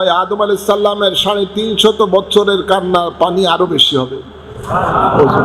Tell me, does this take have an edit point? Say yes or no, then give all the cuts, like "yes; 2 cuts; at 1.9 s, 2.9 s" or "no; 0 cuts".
no; 0 cuts